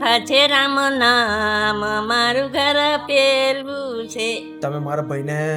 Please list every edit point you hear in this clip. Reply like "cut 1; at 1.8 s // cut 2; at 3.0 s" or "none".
cut 1; at 4.6 s